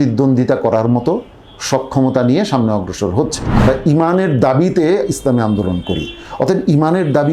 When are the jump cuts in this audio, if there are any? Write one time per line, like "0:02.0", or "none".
0:03.4